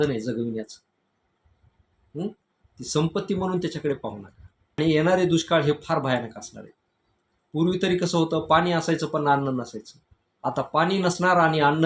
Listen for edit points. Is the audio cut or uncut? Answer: cut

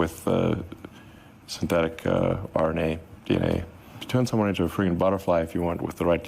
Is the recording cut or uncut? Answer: cut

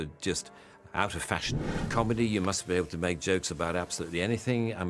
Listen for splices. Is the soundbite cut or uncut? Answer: cut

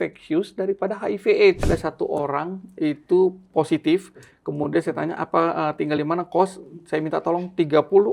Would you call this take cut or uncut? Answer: cut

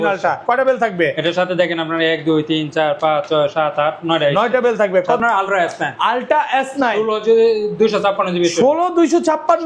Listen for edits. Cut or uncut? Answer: cut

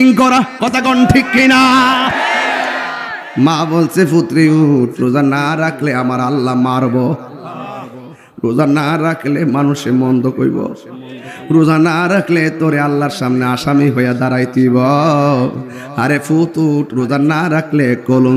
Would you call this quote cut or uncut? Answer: cut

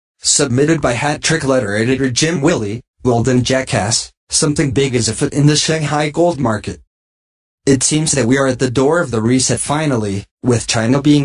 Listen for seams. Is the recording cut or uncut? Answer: uncut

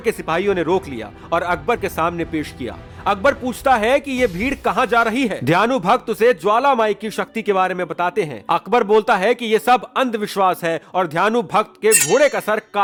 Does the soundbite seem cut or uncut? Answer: uncut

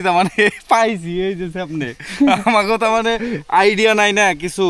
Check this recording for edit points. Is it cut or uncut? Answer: uncut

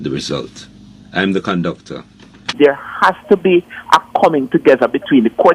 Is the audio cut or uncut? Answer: cut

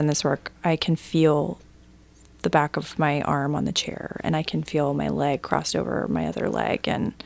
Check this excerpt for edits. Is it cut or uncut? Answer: uncut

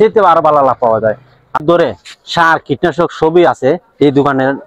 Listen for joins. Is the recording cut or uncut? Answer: cut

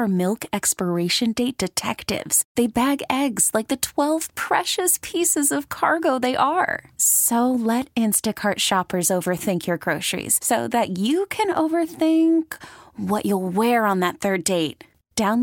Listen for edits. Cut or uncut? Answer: uncut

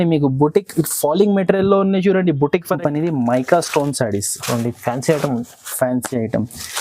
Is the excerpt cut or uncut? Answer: cut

